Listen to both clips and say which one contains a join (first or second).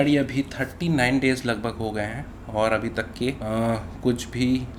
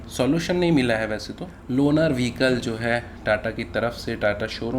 second